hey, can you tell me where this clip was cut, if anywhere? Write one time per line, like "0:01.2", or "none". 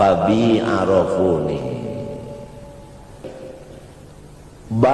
0:03.2